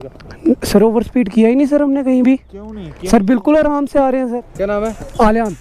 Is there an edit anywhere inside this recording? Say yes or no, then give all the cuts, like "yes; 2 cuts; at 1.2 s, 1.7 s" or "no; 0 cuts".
yes; 1 cut; at 4.4 s